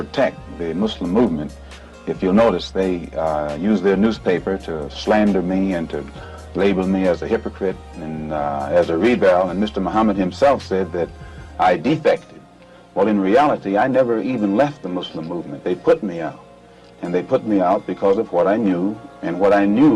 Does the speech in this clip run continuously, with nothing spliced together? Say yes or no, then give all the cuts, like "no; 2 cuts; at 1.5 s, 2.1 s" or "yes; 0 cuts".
yes; 0 cuts